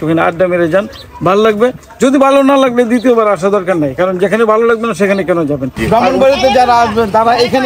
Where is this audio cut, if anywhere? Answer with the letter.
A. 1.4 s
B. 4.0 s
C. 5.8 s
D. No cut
C